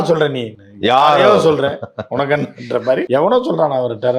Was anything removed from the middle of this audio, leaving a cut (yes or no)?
yes